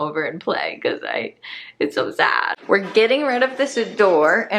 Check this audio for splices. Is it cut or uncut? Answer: cut